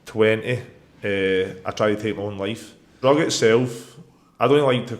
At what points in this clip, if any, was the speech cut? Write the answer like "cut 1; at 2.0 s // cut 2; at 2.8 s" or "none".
cut 1; at 3.0 s